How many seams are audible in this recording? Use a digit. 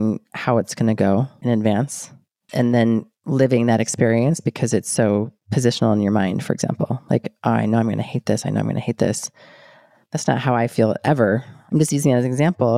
1